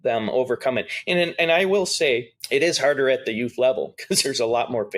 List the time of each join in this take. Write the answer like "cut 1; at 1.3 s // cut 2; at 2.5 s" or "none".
cut 1; at 2.3 s